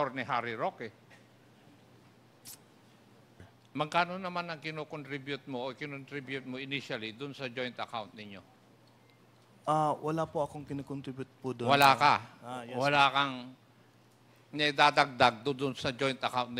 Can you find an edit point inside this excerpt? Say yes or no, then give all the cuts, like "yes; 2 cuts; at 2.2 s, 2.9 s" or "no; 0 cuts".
yes; 1 cut; at 3.5 s